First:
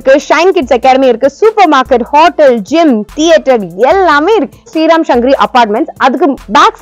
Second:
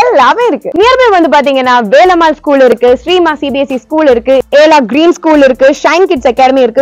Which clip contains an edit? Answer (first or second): first